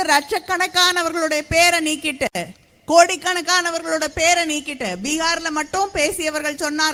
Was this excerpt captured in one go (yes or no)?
yes